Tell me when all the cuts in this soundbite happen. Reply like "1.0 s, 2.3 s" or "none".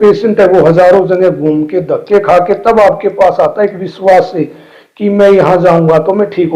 none